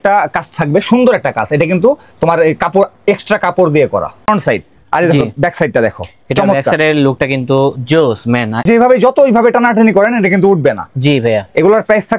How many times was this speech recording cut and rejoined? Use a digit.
2